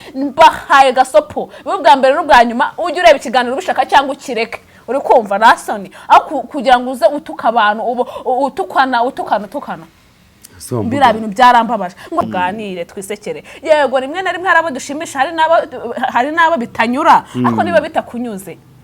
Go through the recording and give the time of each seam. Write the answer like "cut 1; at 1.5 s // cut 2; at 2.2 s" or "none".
cut 1; at 12.2 s

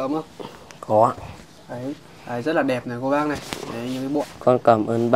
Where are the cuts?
cut 1; at 4.2 s

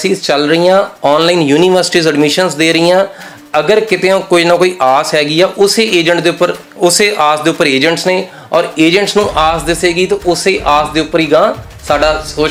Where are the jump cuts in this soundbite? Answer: none

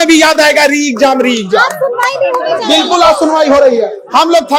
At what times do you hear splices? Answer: none

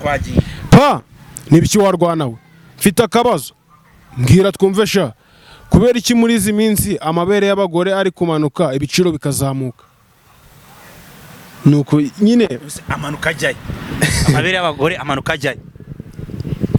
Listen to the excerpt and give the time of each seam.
none

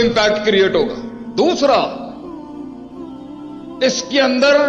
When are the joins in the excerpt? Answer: cut 1; at 2.2 s // cut 2; at 3.8 s

